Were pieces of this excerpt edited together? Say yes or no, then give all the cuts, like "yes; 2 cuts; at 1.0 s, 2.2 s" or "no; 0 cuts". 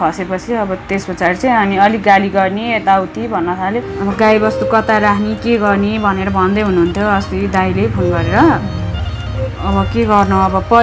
yes; 1 cut; at 3.9 s